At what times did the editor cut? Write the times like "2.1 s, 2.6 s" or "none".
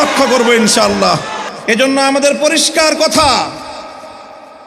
1.8 s